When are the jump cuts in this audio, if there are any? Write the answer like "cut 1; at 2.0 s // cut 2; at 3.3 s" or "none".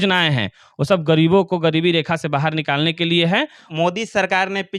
cut 1; at 3.6 s